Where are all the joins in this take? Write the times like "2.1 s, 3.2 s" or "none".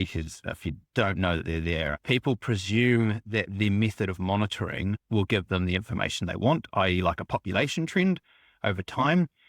2.0 s